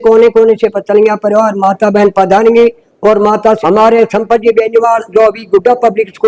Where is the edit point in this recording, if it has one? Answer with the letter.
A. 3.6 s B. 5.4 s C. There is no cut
A